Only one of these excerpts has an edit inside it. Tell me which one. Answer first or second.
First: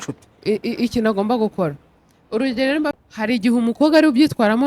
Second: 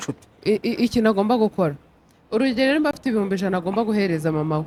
first